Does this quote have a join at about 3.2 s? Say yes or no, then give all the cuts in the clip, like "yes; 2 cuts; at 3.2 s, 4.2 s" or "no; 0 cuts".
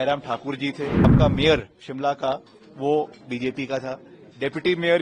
no; 1 cut; at 1.1 s